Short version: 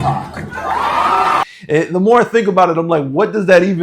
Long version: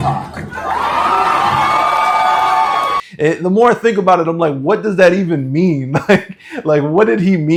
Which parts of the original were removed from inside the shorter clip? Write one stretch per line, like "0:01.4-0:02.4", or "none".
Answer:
0:01.5-0:03.0